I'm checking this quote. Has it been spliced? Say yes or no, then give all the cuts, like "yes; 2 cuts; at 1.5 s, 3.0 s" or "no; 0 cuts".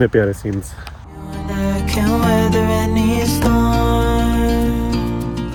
no; 0 cuts